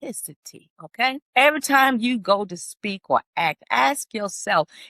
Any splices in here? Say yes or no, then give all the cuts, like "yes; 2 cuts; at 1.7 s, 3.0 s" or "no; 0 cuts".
yes; 1 cut; at 1.2 s